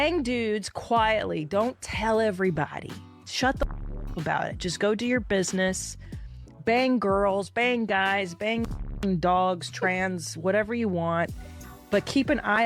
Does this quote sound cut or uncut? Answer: cut